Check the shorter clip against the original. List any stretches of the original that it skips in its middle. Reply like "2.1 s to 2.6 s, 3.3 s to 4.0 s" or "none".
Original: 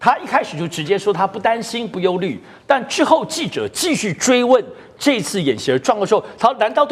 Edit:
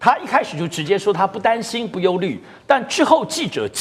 none